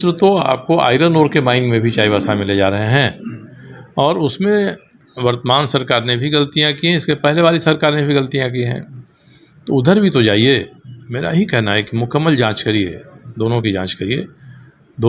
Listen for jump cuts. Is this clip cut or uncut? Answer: uncut